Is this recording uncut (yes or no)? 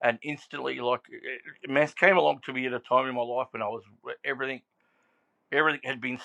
yes